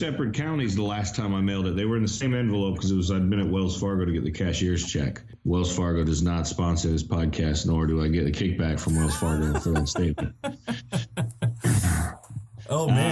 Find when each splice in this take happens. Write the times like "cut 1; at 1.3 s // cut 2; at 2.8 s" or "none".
cut 1; at 5.3 s